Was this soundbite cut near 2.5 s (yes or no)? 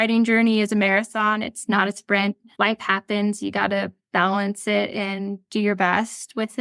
yes